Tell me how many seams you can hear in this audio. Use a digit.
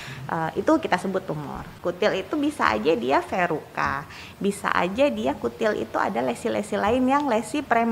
1